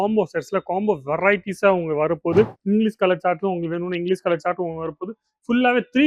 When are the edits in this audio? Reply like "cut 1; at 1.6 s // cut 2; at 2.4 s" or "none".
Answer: cut 1; at 2.6 s

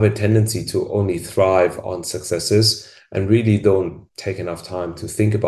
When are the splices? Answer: none

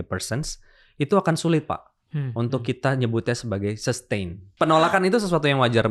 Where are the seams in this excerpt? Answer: cut 1; at 4.4 s

